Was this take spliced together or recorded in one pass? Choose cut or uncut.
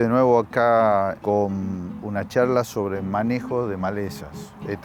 cut